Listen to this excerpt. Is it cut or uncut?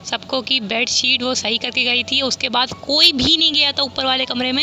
uncut